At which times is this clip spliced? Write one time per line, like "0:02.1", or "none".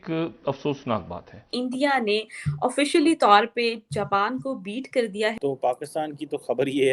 0:01.5
0:05.4